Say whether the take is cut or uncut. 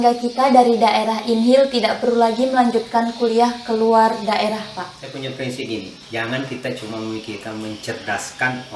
cut